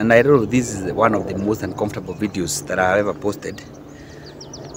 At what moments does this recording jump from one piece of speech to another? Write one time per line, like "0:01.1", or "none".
none